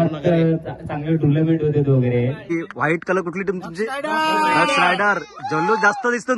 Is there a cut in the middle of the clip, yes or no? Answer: yes